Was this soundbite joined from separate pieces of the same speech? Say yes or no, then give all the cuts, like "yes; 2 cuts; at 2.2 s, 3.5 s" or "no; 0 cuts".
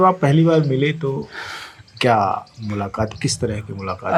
no; 0 cuts